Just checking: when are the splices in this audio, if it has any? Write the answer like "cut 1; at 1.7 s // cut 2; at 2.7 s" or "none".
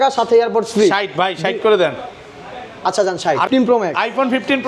cut 1; at 3.5 s